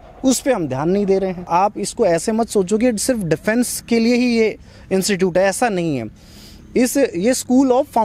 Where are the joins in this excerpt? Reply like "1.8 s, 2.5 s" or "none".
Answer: 1.5 s